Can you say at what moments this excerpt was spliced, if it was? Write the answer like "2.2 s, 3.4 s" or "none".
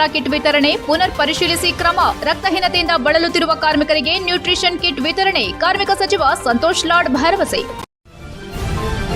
7.7 s